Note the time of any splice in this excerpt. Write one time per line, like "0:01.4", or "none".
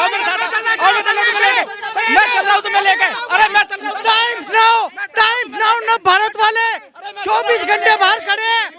none